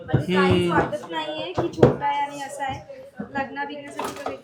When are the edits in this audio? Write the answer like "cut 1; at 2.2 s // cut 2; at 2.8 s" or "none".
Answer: none